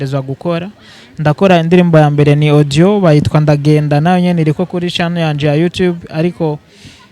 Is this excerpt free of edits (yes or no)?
yes